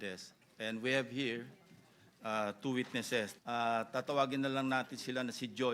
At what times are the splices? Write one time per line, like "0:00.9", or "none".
0:03.4